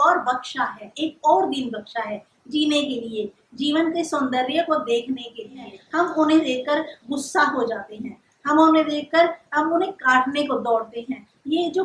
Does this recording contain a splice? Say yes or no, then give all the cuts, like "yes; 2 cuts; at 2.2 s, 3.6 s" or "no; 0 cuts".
yes; 1 cut; at 5.8 s